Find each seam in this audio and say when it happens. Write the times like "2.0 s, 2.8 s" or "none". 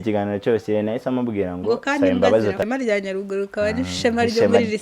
2.6 s